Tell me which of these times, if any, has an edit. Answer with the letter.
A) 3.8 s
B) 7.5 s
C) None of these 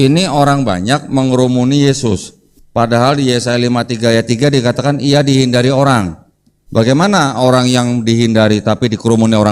C